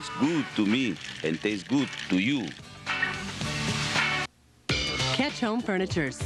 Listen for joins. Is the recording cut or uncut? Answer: cut